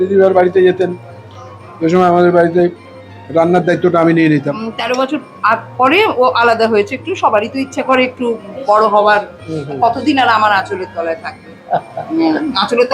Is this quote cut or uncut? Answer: cut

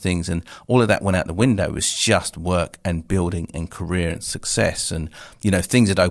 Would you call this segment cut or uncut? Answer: uncut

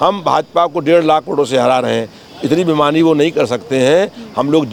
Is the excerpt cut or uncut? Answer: uncut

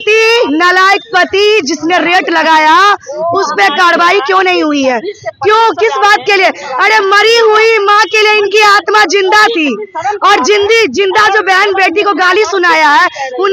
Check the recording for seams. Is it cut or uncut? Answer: uncut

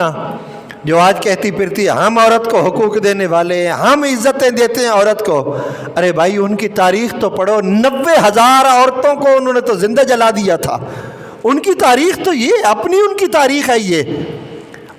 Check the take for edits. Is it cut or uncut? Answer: uncut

